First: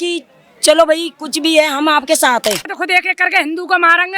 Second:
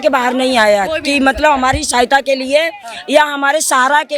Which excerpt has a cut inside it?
first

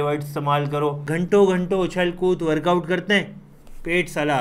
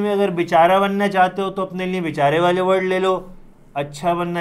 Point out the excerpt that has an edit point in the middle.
first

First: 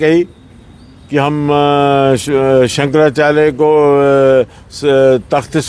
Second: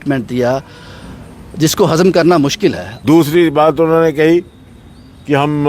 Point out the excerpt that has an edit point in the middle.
second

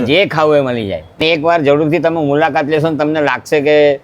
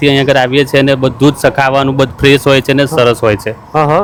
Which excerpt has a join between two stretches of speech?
first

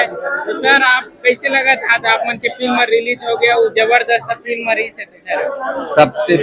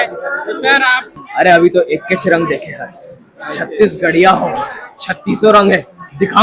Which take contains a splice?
second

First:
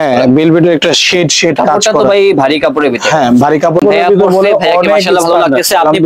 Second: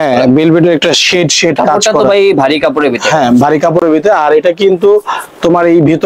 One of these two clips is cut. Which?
first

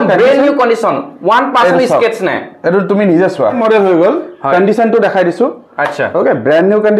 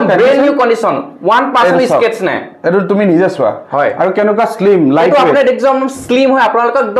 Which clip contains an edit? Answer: first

